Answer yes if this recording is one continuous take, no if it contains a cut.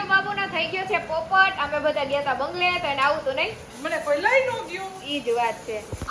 yes